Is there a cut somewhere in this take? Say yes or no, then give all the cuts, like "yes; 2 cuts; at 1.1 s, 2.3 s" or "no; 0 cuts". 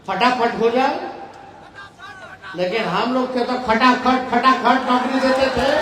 no; 0 cuts